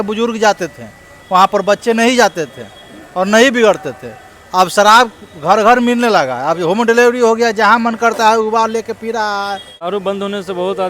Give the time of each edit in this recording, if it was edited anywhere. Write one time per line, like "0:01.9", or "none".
0:09.9